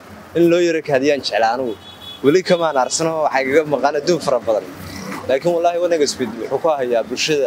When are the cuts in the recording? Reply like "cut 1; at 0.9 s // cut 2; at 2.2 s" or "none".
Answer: none